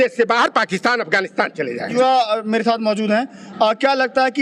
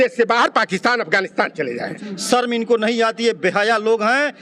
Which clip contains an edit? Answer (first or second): second